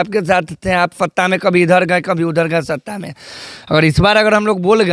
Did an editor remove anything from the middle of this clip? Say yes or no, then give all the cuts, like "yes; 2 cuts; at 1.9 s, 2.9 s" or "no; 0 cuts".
no; 0 cuts